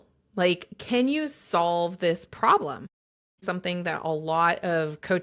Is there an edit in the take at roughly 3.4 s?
yes; 1 cut; at 3.4 s

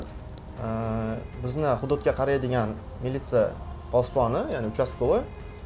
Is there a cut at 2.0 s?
no; 0 cuts

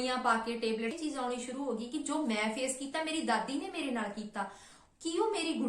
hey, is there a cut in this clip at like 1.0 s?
yes; 1 cut; at 1.0 s

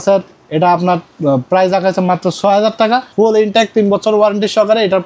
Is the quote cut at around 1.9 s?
no; 1 cut; at 3.1 s

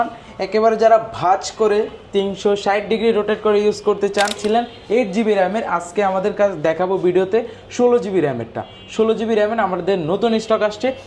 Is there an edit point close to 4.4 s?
yes; 1 cut; at 4.4 s

